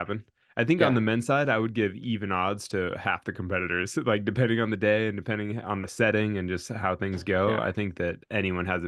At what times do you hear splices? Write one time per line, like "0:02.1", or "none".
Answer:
none